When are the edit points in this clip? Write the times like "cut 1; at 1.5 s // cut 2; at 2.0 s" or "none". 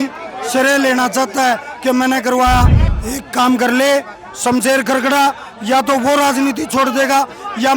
cut 1; at 2.8 s